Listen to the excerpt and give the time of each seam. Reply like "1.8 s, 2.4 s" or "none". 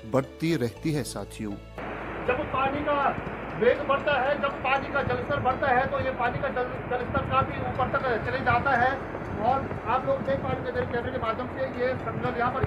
1.9 s